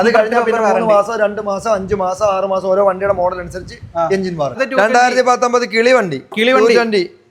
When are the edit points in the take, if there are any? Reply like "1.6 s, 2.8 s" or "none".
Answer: 4.6 s